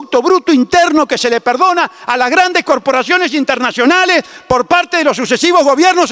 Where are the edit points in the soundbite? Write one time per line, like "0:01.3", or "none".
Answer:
none